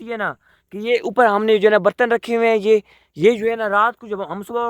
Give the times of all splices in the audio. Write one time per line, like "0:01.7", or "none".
none